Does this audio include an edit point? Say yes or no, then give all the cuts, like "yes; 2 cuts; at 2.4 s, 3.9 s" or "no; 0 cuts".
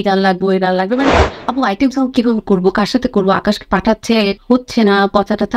yes; 2 cuts; at 1.2 s, 4.4 s